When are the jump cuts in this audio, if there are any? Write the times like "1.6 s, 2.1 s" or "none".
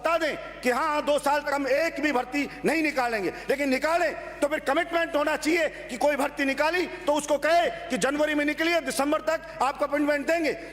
1.5 s